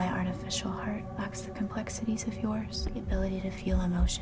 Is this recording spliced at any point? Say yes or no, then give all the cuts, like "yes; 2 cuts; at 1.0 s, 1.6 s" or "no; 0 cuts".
yes; 2 cuts; at 1.1 s, 2.9 s